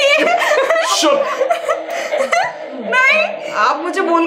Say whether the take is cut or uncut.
uncut